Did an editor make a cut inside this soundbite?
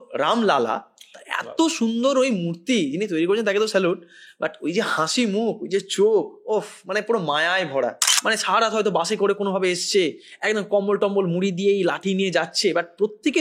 yes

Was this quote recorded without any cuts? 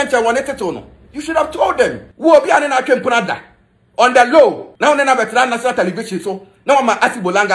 no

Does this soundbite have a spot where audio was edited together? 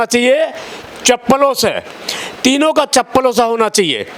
no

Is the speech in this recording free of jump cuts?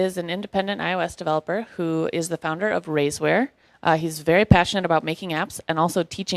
no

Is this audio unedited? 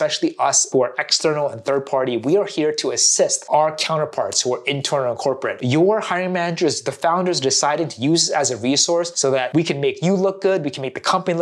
no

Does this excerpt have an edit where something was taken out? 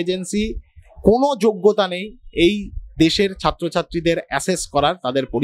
no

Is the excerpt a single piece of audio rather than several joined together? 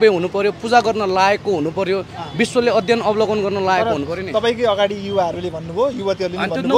yes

